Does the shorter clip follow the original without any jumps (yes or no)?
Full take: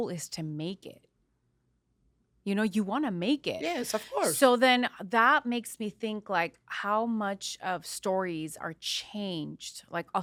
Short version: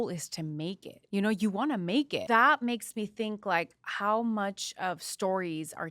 no